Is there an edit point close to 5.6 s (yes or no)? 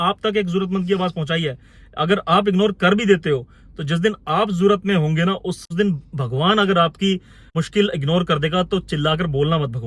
yes